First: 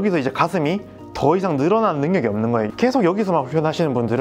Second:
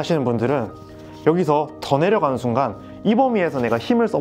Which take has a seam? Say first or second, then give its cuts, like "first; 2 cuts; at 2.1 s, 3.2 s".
first; 1 cut; at 2.7 s